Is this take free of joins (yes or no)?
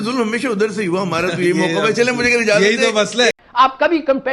no